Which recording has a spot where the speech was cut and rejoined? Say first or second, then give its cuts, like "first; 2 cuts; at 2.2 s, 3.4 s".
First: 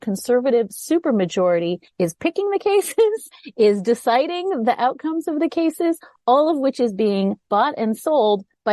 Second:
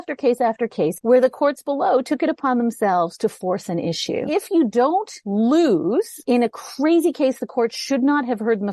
second; 4 cuts; at 1.0 s, 4.3 s, 5.2 s, 6.2 s